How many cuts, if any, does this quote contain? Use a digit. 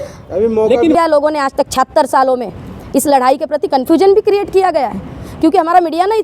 1